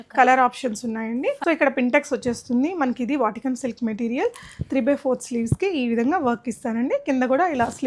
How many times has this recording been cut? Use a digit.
1